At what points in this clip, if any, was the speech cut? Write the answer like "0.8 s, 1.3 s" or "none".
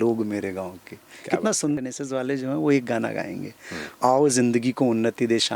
1.8 s